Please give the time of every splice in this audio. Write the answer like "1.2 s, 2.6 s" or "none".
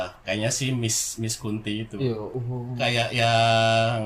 2.8 s